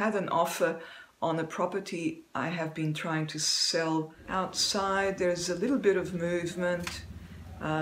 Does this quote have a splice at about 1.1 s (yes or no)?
no